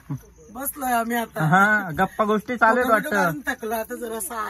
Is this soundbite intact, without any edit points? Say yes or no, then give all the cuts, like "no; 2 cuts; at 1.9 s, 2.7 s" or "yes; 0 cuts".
yes; 0 cuts